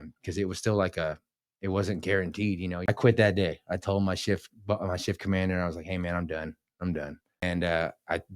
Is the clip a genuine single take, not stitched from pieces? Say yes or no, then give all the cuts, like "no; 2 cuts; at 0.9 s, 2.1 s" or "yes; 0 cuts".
no; 2 cuts; at 2.8 s, 7.4 s